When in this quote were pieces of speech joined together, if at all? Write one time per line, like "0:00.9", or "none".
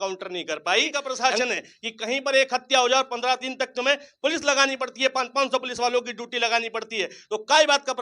0:01.0